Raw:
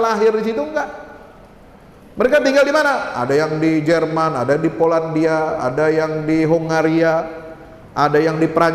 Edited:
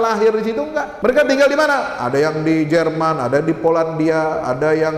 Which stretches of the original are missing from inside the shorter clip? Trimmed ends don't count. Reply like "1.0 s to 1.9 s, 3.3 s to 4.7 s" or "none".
0.9 s to 2.1 s